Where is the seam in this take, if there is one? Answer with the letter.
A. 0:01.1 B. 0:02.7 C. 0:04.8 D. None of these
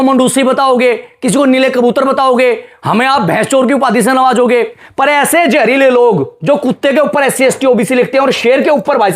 C